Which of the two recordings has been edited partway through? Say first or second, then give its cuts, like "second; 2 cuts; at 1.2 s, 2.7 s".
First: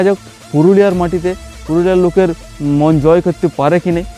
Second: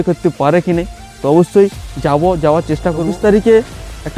second; 1 cut; at 3.0 s